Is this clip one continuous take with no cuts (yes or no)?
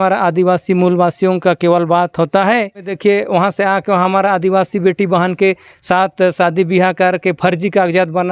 no